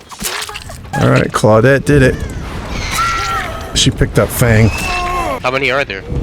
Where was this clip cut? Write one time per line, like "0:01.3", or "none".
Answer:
0:00.9
0:03.8
0:05.4